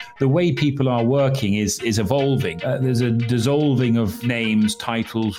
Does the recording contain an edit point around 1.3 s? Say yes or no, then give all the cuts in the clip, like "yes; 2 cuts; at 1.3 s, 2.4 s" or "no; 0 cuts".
no; 2 cuts; at 2.5 s, 4.2 s